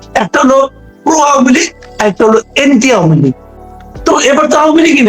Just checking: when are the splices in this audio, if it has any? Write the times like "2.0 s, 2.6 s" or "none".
3.5 s